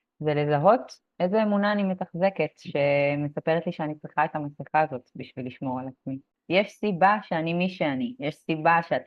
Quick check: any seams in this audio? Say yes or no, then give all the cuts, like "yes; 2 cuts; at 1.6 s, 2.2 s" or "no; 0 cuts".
yes; 1 cut; at 6.3 s